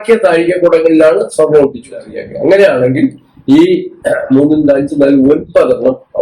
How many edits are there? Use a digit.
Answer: 1